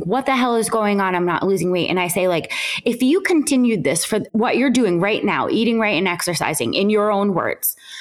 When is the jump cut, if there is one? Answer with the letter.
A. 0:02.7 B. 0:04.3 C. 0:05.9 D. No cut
B